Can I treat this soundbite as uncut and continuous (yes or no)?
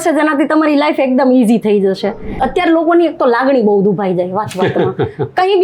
no